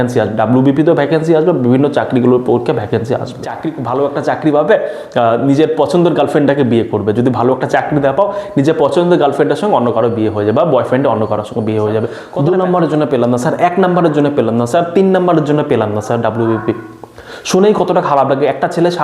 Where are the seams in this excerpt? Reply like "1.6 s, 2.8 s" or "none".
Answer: 3.8 s, 12.2 s